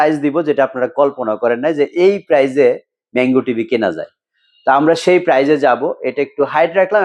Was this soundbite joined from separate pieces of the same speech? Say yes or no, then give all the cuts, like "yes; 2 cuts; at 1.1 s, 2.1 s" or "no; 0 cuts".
no; 0 cuts